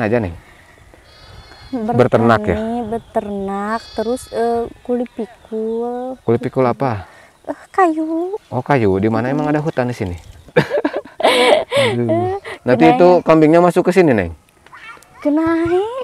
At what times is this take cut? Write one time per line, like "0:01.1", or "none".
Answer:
0:10.5